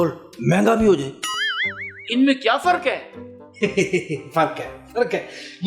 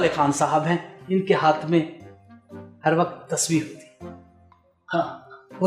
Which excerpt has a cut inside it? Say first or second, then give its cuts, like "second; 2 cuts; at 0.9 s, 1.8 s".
first; 1 cut; at 1.2 s